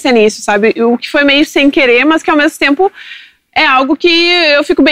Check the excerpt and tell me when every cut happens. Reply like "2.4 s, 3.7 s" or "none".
none